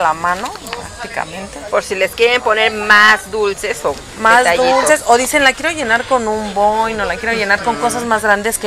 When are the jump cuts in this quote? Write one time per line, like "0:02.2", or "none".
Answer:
none